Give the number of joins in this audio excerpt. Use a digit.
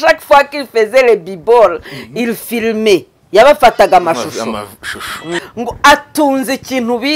1